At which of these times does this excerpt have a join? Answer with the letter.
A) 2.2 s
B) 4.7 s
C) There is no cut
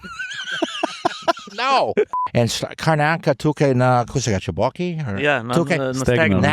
A